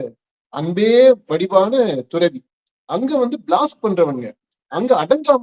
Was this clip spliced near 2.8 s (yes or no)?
no